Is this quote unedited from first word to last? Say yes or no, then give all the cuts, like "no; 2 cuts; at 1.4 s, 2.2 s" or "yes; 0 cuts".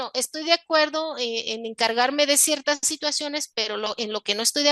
yes; 0 cuts